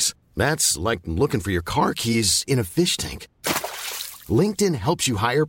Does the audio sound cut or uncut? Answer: uncut